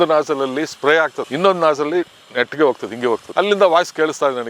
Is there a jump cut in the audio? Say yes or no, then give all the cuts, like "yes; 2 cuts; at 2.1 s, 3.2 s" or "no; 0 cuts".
yes; 1 cut; at 3.3 s